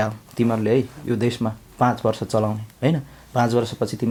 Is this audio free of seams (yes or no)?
yes